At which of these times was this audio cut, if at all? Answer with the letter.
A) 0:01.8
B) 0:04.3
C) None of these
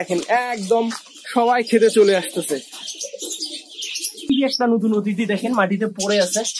B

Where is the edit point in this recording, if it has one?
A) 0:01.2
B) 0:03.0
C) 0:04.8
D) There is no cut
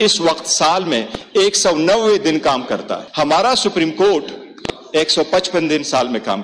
B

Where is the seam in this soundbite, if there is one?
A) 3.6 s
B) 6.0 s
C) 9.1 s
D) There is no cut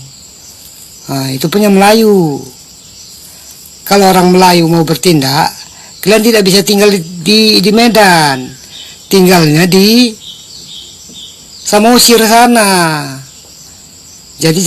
D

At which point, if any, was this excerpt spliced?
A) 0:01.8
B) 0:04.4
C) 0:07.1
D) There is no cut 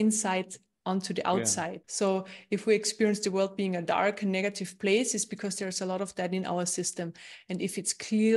A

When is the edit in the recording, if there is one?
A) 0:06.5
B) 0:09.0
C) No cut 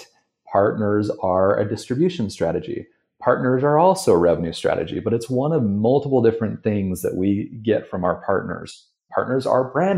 B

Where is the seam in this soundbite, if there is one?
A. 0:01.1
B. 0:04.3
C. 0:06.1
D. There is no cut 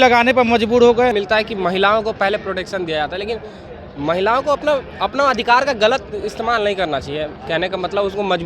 A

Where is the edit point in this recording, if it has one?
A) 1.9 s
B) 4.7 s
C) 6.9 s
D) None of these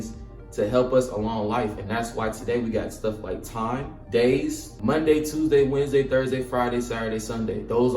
B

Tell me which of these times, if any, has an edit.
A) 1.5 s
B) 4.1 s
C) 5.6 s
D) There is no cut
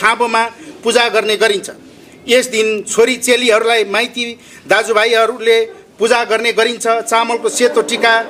D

